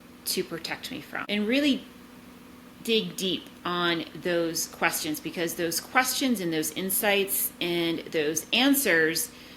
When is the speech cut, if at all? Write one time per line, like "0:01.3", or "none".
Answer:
0:01.2